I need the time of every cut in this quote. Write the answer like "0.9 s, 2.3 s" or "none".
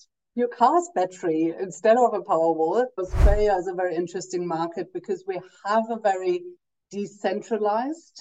3.0 s